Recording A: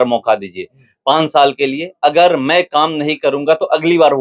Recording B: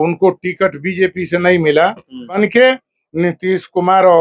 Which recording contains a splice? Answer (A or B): B